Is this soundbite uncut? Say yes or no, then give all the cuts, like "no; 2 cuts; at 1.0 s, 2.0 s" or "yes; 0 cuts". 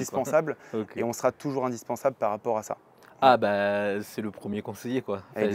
yes; 0 cuts